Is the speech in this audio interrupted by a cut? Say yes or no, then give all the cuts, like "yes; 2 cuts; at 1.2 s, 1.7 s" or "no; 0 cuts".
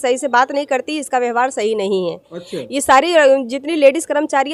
no; 0 cuts